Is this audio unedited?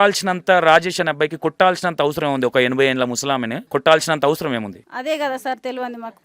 no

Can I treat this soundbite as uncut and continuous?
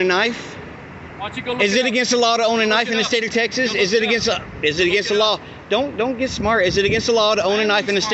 yes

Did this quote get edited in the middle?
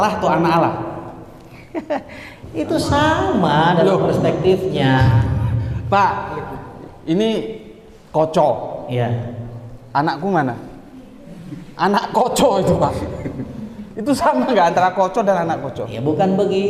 no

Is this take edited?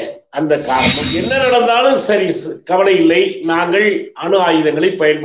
yes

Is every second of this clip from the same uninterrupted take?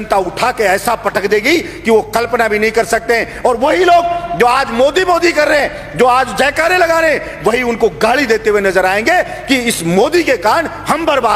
yes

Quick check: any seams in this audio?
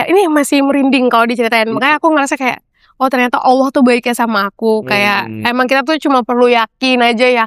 no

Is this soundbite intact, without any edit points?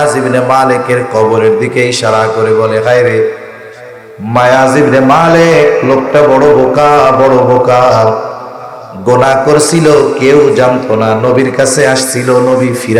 yes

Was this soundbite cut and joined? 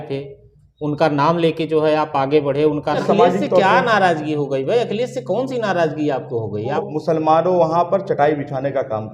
yes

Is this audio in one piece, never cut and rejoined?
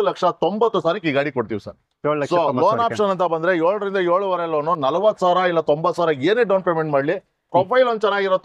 yes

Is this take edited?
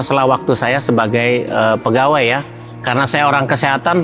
yes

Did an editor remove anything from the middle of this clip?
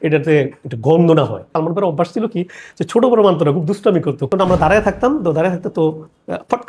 yes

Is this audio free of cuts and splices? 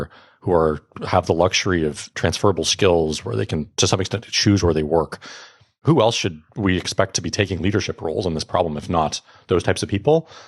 no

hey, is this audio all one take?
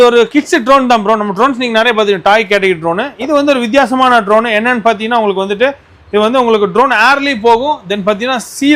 yes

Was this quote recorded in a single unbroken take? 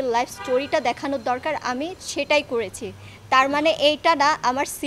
yes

